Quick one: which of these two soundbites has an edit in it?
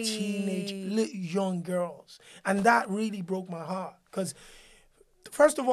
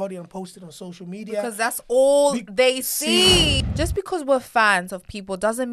second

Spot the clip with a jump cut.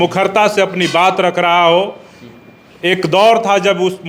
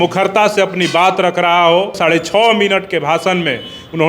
second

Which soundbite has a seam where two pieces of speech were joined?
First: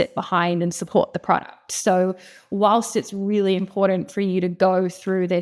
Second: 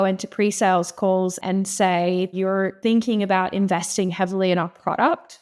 second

